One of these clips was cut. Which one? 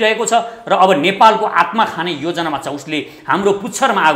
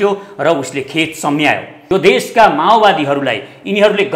second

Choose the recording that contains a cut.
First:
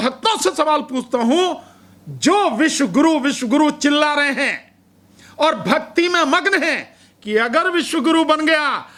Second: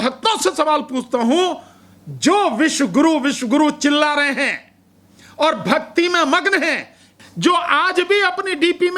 second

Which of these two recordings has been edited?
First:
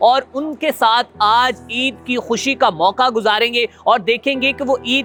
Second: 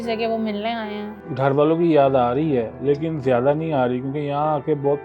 second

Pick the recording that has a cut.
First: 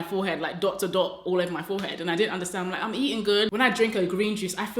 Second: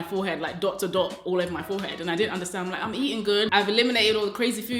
first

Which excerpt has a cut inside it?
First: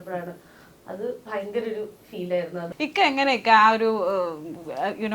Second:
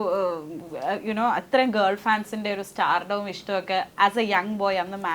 first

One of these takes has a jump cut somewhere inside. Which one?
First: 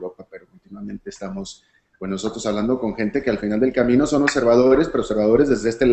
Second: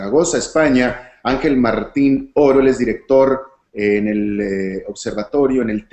second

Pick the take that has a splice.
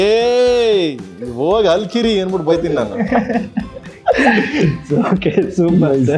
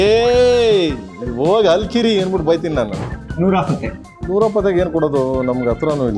second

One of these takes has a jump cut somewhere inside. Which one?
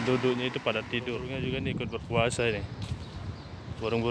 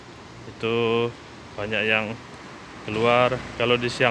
first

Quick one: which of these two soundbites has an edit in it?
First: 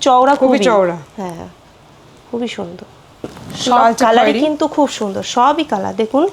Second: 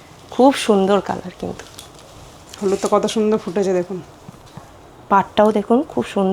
first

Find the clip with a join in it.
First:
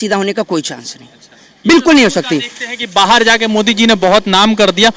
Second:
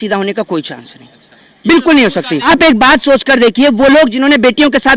second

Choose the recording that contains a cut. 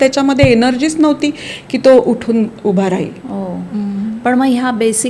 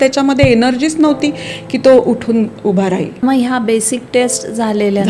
second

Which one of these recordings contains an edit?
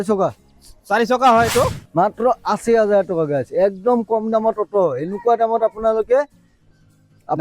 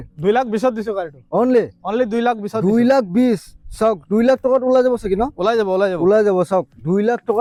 first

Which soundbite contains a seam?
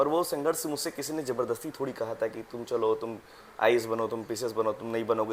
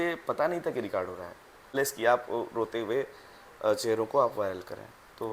second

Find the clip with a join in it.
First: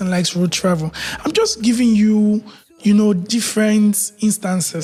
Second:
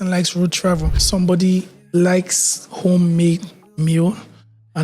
second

